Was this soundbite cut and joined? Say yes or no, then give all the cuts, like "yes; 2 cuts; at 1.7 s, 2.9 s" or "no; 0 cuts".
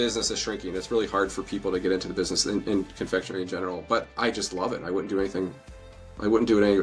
no; 0 cuts